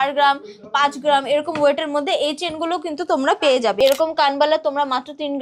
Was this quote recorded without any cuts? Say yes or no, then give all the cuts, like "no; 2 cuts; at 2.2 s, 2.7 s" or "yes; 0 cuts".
no; 1 cut; at 3.8 s